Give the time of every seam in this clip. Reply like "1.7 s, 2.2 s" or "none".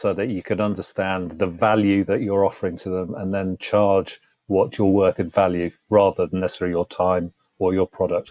none